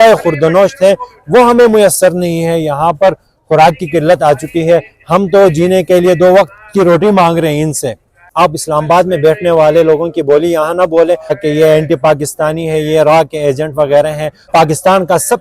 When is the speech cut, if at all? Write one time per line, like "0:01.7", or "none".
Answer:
0:08.2
0:11.4
0:14.3